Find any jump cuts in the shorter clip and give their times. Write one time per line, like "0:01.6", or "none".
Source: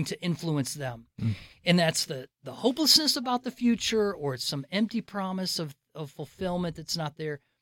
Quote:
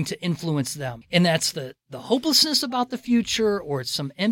0:01.0

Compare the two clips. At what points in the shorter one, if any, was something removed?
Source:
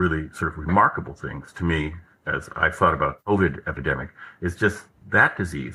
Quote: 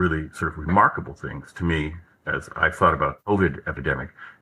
none

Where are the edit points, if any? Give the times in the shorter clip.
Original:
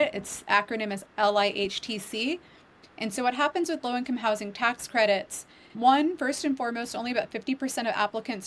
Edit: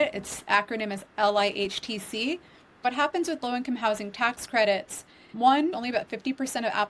0:02.8
0:05.7

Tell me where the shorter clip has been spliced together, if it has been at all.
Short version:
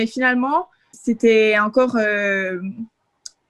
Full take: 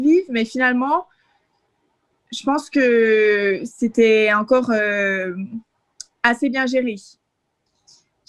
0:00.9

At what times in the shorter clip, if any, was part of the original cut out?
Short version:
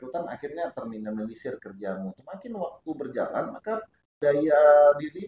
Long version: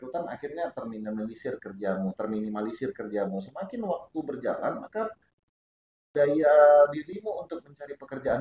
0:02.2
0:04.0

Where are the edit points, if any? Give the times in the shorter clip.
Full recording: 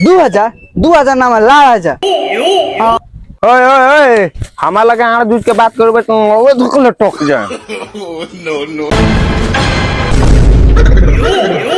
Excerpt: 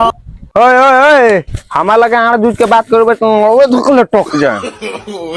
none

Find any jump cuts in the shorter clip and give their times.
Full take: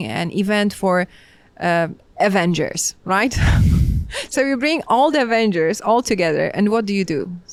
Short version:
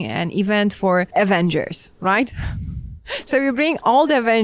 0:01.1

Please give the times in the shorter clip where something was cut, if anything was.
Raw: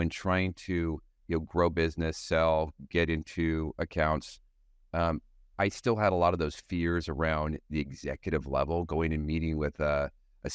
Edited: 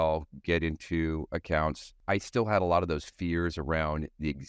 0:01.9

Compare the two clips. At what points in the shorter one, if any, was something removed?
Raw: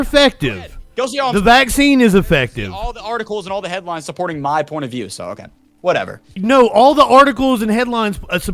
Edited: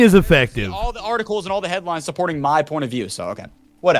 none

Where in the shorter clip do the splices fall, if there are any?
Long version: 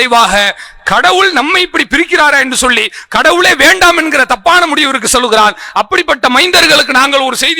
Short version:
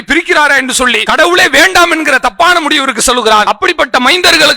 0:01.0
0:03.4

